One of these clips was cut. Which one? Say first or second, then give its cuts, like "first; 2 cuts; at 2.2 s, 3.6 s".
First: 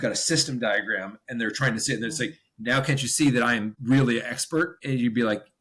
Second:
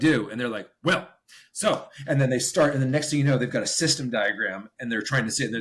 first; 2 cuts; at 3.7 s, 4.8 s